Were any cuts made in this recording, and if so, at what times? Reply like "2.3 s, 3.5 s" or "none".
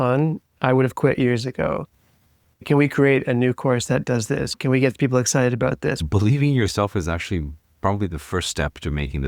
2.6 s, 6.0 s